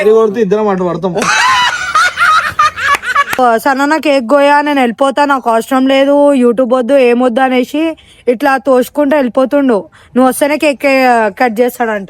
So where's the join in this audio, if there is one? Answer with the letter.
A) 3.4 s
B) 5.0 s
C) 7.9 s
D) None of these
A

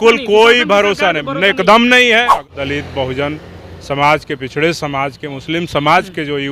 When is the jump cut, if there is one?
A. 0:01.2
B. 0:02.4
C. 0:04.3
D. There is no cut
B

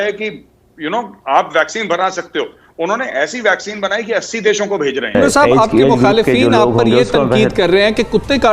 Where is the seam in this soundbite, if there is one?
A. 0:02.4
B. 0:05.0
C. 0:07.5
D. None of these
B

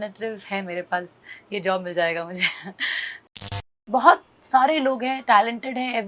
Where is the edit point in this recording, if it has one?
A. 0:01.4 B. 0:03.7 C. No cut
B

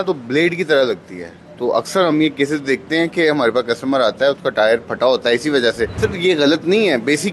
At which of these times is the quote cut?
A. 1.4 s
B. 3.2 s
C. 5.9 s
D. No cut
C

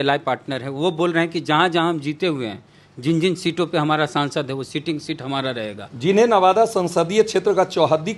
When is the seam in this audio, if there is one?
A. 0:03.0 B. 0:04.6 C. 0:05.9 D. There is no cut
C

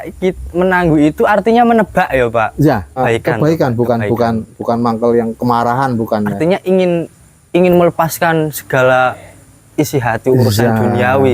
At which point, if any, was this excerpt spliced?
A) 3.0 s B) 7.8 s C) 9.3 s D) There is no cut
A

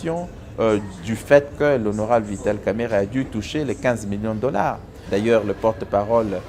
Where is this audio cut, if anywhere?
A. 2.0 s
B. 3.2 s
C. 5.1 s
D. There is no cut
C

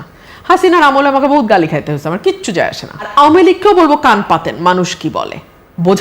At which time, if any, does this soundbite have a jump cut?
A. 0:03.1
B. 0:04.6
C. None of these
A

